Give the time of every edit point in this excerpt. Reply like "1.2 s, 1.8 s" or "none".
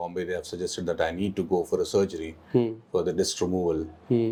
none